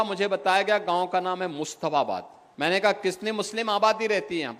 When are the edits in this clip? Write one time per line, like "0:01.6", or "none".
0:02.4